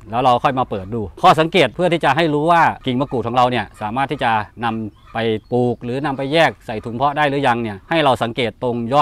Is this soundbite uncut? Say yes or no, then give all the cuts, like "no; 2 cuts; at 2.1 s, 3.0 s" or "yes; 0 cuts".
yes; 0 cuts